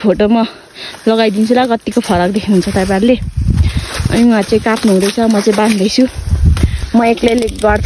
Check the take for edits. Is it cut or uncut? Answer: cut